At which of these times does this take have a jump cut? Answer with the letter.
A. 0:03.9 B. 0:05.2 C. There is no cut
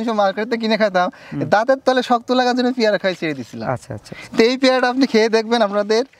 C